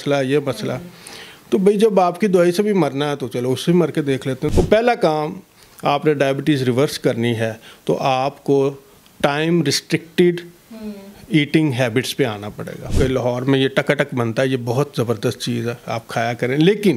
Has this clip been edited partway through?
yes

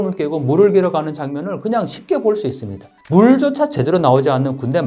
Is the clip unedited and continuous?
yes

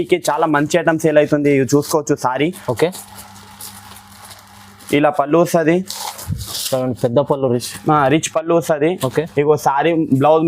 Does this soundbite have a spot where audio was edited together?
no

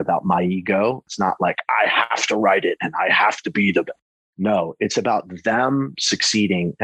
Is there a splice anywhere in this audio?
yes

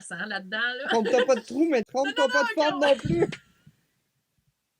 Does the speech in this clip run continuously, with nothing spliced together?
no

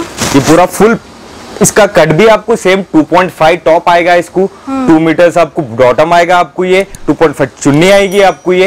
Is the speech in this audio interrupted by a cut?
no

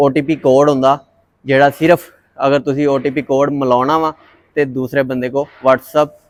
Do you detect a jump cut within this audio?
no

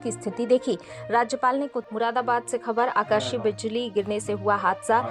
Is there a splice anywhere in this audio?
yes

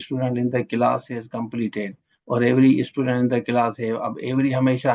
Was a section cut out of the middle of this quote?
no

